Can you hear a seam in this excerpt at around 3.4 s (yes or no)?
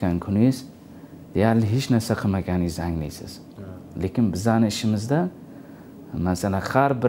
no